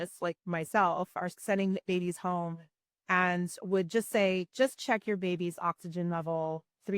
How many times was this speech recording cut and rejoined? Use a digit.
1